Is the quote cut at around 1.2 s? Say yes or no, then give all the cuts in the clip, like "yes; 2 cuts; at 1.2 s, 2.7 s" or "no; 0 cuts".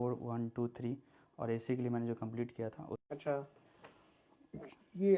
no; 1 cut; at 3.0 s